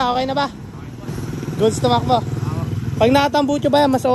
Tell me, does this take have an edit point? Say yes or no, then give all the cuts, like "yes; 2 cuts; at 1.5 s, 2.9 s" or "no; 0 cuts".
no; 0 cuts